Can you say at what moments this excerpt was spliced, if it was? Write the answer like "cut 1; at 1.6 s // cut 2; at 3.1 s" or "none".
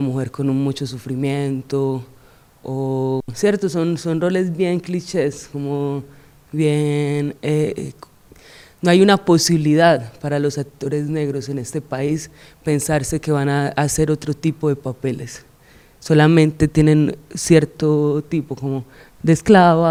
none